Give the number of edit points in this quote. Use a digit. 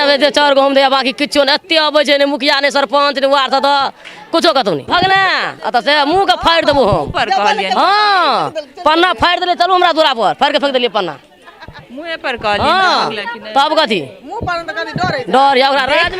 1